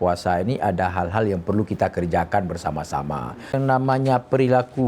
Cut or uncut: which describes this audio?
cut